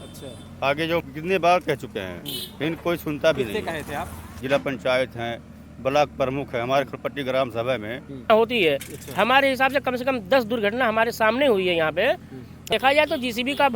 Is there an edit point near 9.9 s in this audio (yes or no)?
no